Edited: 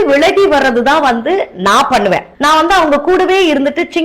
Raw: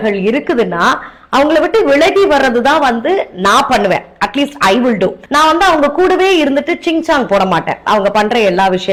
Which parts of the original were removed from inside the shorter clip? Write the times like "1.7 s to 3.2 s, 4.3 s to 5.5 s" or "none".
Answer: 4.1 s to 5.2 s

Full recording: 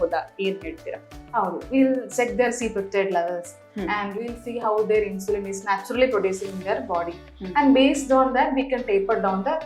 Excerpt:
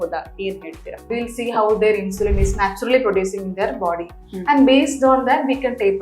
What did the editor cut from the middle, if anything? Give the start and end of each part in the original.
1.1 s to 4.1 s

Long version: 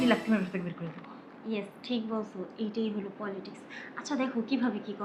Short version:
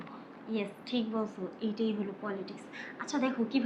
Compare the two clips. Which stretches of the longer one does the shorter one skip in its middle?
none

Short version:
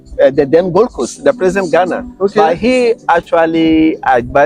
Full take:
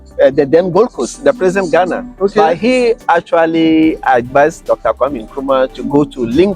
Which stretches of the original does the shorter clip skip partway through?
none

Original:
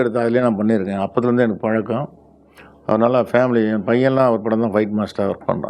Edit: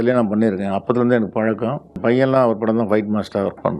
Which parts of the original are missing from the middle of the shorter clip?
2.2 s to 3.8 s

